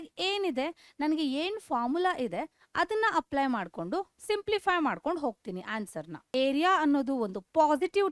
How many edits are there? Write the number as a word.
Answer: one